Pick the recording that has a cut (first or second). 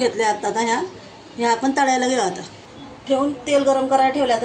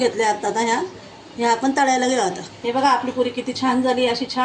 second